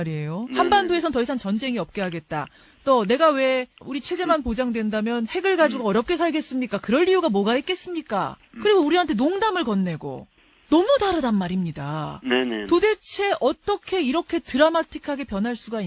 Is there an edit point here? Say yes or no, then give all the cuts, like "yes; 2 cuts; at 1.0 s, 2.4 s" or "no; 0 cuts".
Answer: no; 0 cuts